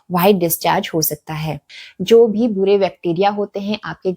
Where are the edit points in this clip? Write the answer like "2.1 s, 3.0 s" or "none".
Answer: 1.7 s